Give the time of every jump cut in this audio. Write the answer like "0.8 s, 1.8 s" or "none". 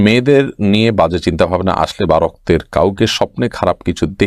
none